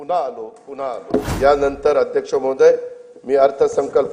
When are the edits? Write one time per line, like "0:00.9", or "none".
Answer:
0:01.3